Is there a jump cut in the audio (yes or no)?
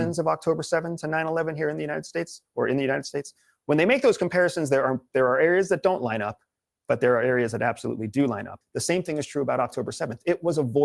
yes